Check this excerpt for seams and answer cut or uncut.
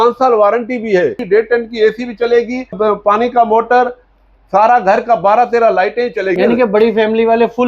cut